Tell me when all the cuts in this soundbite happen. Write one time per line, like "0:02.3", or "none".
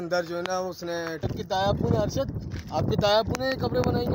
0:01.3